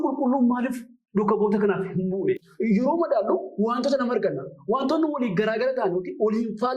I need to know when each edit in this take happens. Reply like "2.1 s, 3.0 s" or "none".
2.5 s